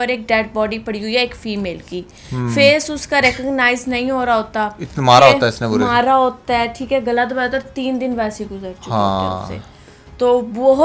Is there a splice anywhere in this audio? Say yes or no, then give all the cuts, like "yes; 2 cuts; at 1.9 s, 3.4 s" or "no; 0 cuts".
no; 0 cuts